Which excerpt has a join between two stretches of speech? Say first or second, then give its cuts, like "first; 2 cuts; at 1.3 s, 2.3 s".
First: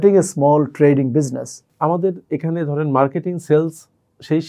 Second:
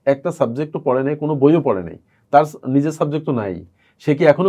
first; 1 cut; at 1.6 s